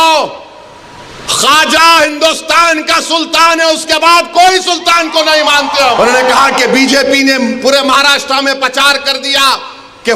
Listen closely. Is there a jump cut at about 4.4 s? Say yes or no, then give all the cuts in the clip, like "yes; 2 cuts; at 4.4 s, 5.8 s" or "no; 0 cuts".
no; 1 cut; at 6.0 s